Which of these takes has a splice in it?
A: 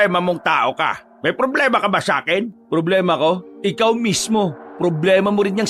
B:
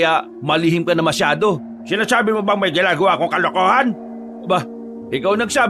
A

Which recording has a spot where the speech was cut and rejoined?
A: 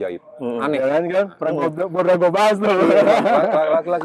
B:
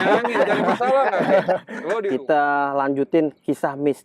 B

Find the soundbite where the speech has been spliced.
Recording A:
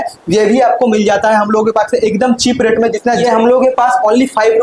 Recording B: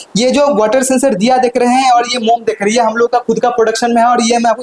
A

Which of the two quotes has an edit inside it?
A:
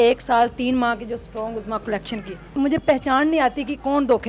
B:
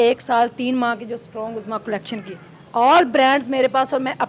A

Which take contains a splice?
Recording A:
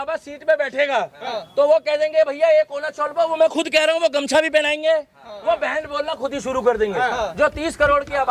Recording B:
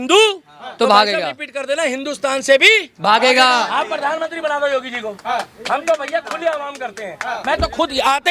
B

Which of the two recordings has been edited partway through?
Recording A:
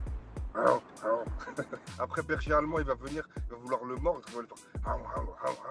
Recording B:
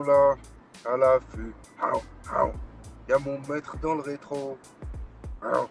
A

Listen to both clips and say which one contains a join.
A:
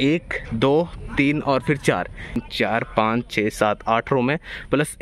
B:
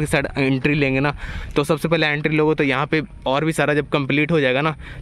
A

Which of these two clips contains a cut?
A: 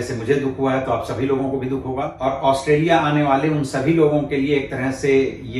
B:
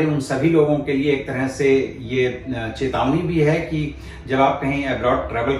A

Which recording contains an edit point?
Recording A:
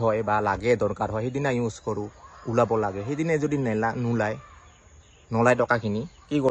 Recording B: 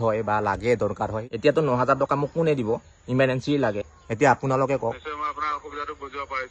B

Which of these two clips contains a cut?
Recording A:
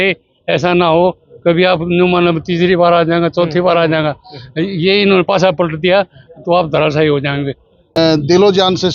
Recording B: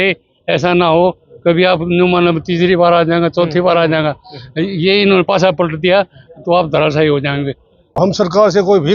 B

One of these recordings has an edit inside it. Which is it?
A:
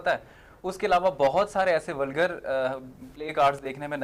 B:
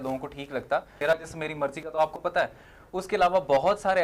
B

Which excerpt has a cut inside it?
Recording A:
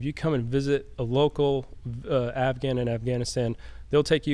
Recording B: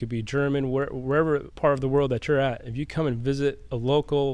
B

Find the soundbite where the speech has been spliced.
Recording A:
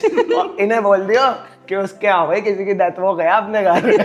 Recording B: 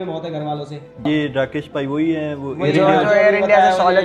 B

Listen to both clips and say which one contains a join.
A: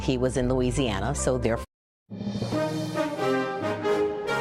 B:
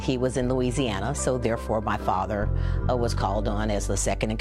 B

